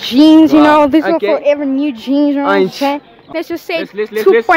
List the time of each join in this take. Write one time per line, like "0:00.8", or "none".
0:03.1